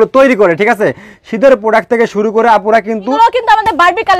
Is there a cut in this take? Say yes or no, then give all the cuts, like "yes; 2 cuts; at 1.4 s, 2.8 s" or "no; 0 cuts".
yes; 1 cut; at 3.1 s